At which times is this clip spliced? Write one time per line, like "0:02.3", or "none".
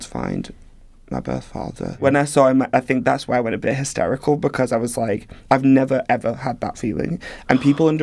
0:02.0

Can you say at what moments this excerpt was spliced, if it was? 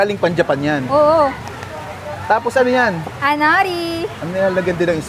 0:01.4
0:04.2

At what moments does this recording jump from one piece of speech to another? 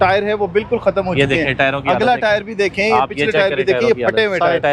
none

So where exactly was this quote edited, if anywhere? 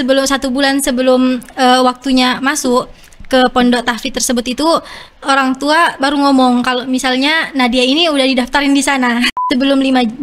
0:09.3

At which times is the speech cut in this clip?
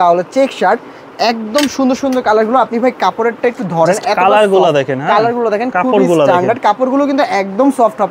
none

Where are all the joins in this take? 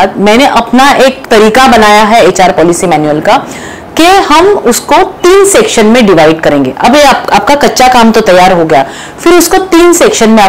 0:01.2

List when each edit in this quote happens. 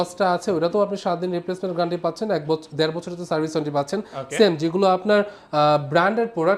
none

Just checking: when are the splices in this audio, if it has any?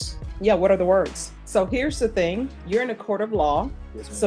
0:01.3
0:02.6

